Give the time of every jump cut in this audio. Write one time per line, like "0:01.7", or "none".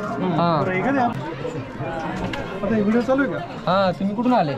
0:01.1